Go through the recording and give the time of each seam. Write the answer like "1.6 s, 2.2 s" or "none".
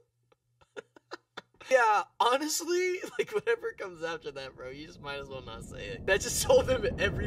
none